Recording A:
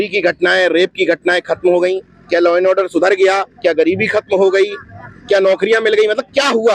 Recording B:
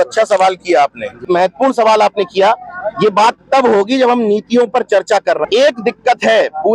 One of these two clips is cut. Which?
B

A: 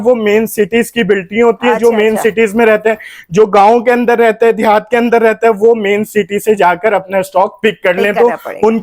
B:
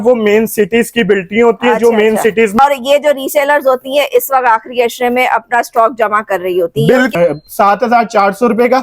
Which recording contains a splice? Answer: B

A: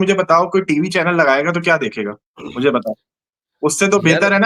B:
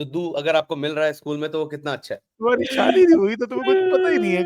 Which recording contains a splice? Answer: B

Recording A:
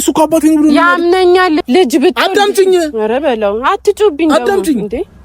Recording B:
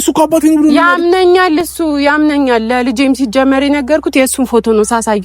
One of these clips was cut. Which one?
A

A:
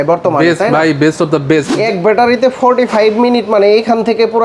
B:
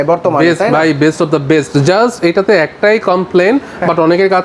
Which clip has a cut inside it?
A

